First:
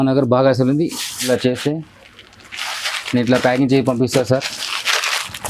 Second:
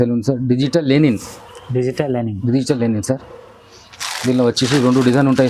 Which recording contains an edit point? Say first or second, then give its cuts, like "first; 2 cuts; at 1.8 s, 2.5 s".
first; 1 cut; at 1.2 s